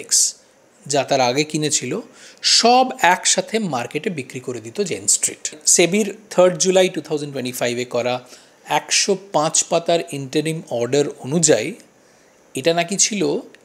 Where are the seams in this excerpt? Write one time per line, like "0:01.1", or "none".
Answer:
0:05.6